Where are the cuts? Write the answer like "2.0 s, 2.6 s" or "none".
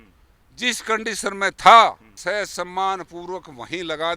2.1 s